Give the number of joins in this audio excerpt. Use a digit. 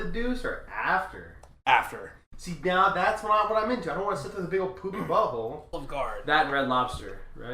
1